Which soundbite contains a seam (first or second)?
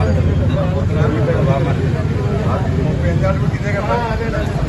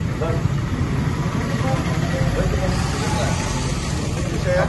first